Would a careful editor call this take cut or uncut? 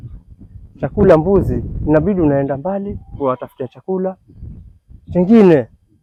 uncut